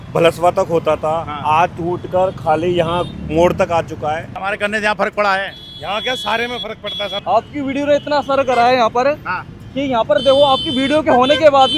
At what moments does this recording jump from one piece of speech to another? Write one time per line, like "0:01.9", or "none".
0:04.3
0:07.1